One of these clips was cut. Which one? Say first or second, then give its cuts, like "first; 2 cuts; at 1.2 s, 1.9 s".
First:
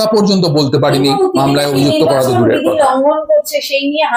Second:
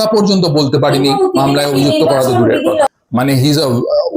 second; 1 cut; at 2.9 s